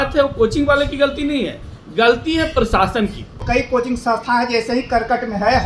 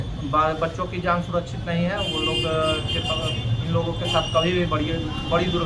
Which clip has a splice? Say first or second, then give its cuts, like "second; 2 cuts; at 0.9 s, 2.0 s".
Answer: first; 1 cut; at 3.4 s